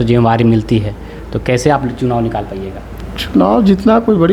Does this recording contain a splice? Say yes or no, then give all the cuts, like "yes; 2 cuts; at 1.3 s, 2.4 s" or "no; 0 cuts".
no; 0 cuts